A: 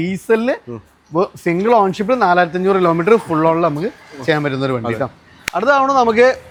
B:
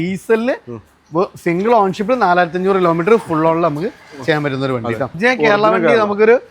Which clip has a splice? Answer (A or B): B